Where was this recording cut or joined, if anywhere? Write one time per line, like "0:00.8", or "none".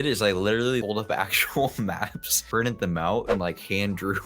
0:00.8
0:02.3